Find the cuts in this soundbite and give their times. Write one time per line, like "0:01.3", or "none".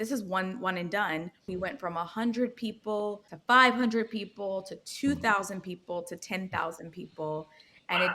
0:01.5
0:03.3

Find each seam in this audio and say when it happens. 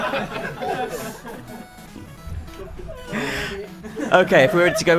none

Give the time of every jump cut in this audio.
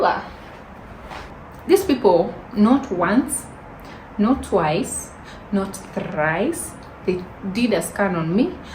0:01.2

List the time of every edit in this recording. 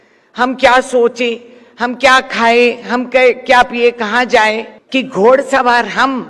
0:04.7

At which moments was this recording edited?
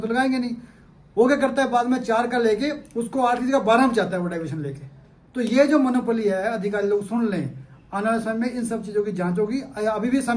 none

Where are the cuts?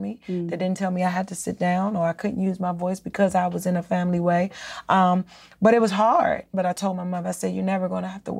0:06.5

